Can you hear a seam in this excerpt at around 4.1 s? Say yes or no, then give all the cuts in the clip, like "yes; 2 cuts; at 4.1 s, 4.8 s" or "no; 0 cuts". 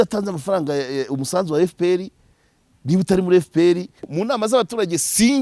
yes; 1 cut; at 4.1 s